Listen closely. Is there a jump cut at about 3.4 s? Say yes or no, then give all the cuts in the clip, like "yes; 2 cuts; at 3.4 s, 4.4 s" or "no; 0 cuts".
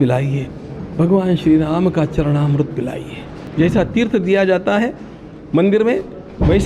yes; 1 cut; at 3.4 s